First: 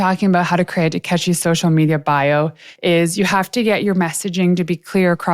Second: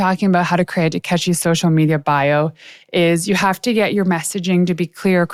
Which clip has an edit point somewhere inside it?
first; 1 cut; at 2.6 s

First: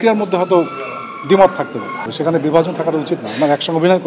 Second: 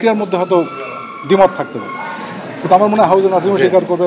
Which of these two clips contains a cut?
first; 1 cut; at 2.1 s

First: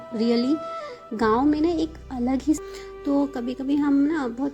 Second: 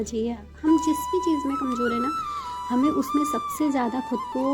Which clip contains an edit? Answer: first; 1 cut; at 2.6 s

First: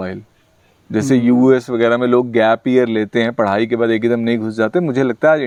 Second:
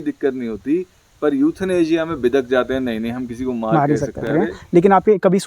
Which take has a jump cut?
second; 1 cut; at 4.3 s

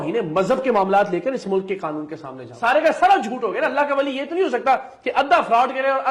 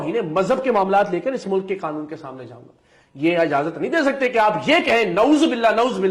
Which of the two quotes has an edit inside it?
first; 1 cut; at 2.5 s

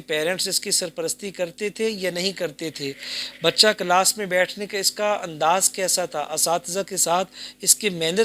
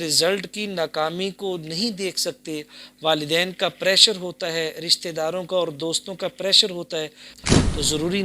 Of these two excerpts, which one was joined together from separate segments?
second; 1 cut; at 7.3 s

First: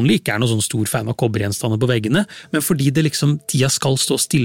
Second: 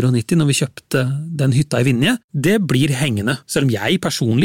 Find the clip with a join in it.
second; 3 cuts; at 1.0 s, 2.3 s, 3.4 s

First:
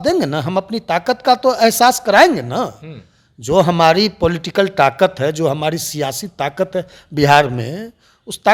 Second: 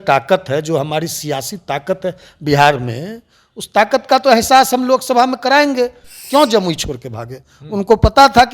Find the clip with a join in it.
second; 1 cut; at 6.2 s

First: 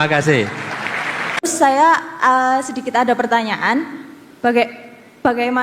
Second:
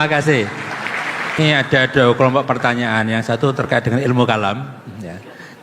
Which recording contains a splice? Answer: first; 1 cut; at 1.3 s

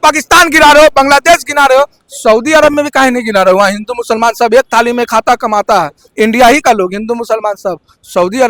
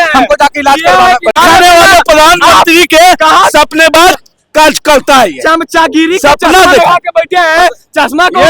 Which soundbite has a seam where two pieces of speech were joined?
second; 1 cut; at 1.3 s

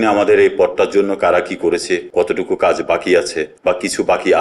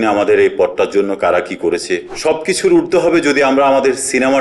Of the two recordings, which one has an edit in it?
second; 1 cut; at 2.1 s

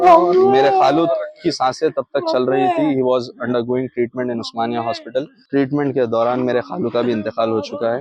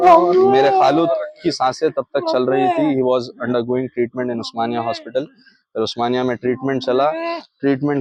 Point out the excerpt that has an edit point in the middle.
first; 1 cut; at 5.4 s

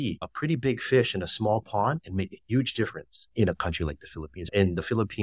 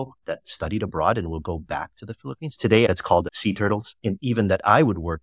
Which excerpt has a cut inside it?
second; 2 cuts; at 2.9 s, 3.9 s

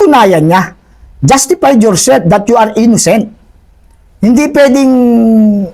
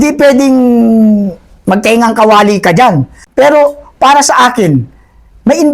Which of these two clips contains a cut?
second; 1 cut; at 3.2 s

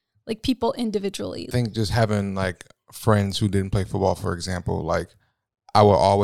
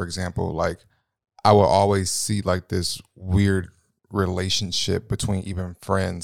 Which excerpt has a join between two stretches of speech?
first; 1 cut; at 1.5 s

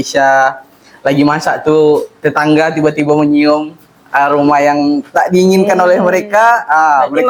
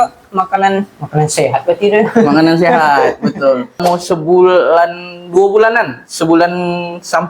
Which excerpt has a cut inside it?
second; 1 cut; at 3.8 s

